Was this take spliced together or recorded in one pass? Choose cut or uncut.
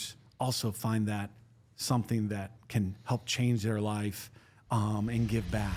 uncut